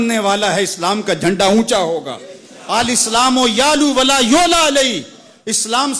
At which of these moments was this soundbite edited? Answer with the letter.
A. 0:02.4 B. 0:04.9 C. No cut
C